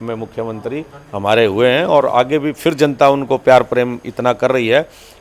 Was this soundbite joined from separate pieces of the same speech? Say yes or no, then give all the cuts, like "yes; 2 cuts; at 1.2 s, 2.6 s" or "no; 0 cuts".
no; 0 cuts